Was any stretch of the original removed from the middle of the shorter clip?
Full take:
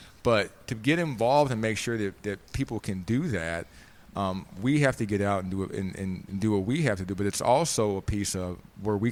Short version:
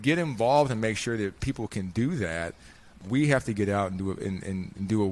yes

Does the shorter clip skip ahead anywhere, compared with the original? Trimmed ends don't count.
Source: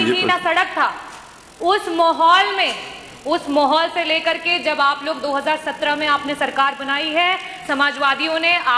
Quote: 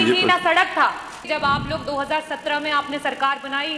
yes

